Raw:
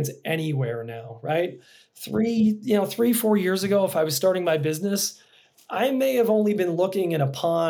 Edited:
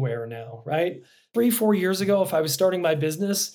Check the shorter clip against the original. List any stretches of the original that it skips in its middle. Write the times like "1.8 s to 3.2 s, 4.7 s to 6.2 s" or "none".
1.9 s to 2.9 s